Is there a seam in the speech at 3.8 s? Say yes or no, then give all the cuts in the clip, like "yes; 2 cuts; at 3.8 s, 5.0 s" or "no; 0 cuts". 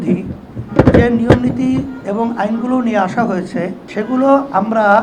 yes; 1 cut; at 3.8 s